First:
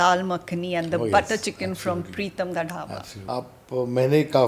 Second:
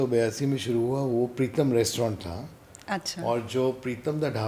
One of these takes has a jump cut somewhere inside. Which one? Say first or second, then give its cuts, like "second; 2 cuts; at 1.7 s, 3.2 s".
first; 1 cut; at 3.1 s